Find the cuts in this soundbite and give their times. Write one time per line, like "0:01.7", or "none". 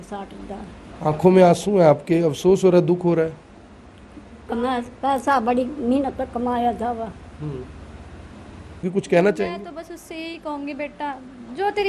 0:08.9